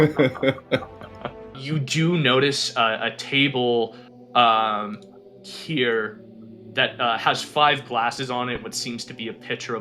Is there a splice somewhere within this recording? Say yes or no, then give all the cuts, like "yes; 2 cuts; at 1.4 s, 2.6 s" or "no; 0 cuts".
yes; 1 cut; at 1.6 s